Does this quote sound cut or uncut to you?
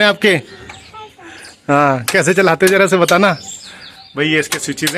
uncut